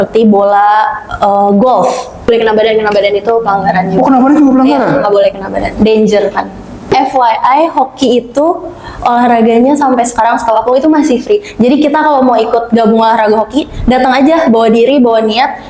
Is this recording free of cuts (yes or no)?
no